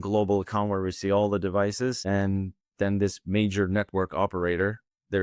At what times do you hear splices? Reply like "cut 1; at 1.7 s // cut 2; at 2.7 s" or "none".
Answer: cut 1; at 2.0 s